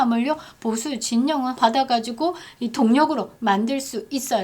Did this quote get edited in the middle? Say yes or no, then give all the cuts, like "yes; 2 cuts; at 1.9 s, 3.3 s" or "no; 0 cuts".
yes; 1 cut; at 1.6 s